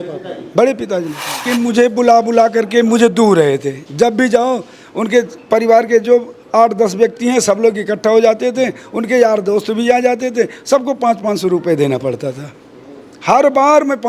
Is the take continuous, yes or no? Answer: no